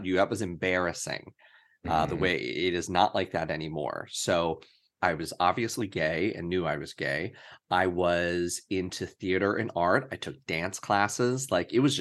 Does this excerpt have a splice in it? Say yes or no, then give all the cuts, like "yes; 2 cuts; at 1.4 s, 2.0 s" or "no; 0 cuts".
yes; 1 cut; at 4.9 s